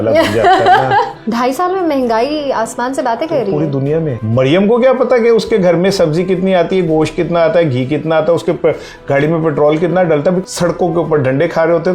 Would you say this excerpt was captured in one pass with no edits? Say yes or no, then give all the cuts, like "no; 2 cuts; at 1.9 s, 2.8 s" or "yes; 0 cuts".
no; 3 cuts; at 1.2 s, 4.2 s, 10.4 s